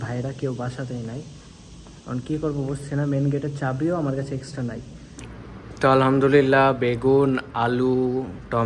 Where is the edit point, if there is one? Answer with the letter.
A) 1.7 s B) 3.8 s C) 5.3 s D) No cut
C